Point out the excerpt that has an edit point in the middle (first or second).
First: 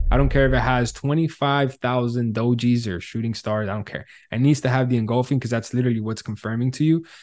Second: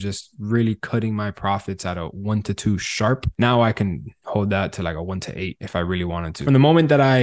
second